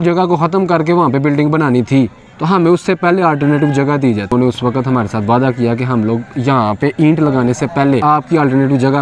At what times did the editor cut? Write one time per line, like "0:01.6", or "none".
0:04.3
0:08.0